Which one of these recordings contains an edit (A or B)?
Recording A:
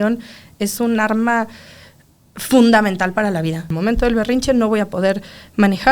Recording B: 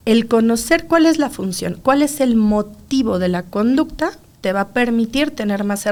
A